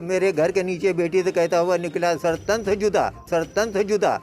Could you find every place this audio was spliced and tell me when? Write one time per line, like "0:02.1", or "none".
0:03.2